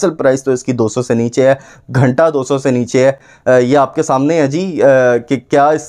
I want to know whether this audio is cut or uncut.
uncut